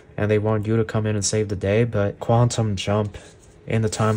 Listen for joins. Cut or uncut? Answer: cut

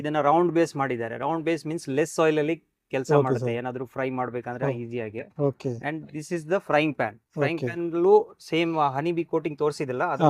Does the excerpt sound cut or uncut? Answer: uncut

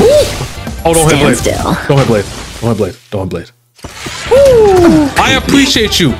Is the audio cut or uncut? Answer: uncut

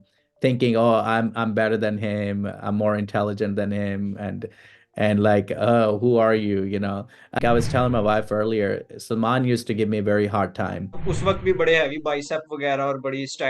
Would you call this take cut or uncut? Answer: cut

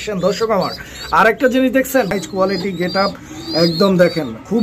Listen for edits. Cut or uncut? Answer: cut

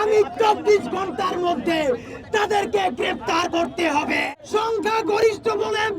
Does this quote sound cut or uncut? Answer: cut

